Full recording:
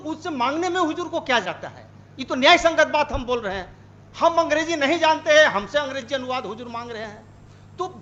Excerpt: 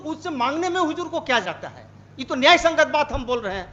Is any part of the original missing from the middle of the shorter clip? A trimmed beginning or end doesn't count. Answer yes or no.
no